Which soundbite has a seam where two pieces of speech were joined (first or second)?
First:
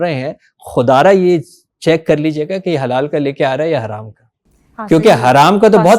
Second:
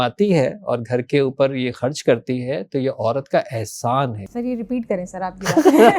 second